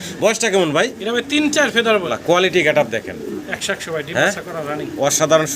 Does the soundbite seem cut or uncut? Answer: cut